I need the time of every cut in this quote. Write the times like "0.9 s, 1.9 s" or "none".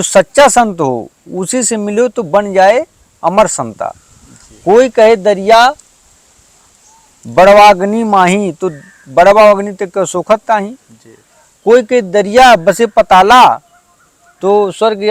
none

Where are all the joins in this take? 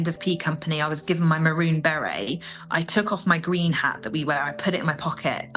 none

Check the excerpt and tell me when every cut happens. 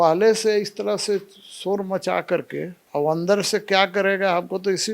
2.8 s

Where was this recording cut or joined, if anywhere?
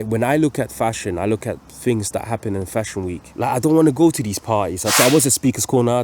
3.2 s, 4.8 s

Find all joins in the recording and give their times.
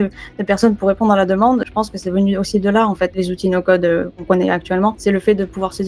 1.7 s, 3.2 s, 4.2 s, 5.0 s

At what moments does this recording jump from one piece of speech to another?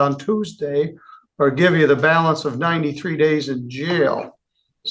none

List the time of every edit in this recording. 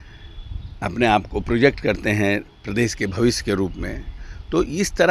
none

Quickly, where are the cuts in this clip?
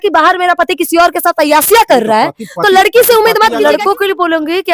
3.6 s

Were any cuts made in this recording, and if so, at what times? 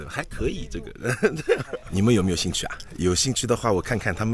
1.8 s

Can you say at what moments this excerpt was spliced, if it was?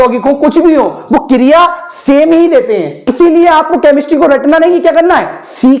3.2 s

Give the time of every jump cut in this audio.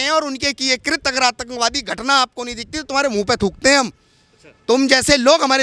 none

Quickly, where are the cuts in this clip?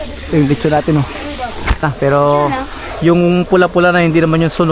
1.8 s

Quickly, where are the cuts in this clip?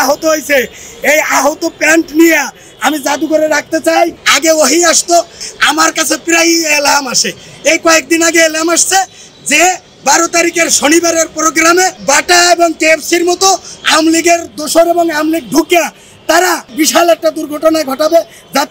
4.2 s, 5.4 s, 12.0 s, 16.7 s

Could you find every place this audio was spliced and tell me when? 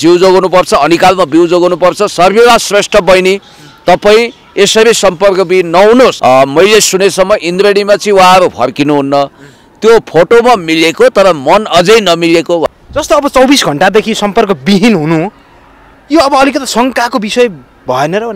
6.2 s, 12.6 s

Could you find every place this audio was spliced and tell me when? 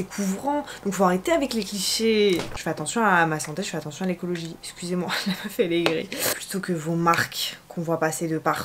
2.5 s, 6.3 s

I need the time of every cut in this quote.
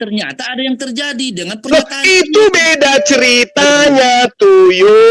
none

